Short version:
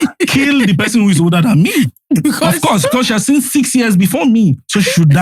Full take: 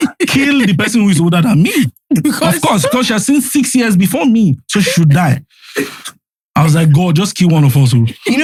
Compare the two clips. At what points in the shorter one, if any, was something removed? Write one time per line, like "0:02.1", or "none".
none